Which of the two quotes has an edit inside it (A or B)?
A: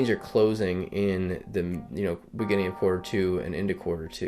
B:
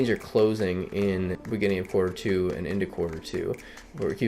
B